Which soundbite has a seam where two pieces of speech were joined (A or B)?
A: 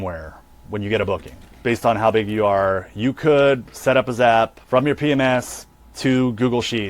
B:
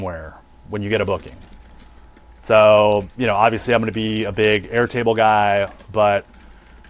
A